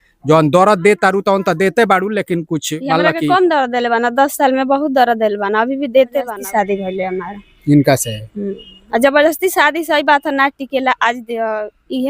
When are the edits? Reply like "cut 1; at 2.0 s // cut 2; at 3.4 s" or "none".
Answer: cut 1; at 6.3 s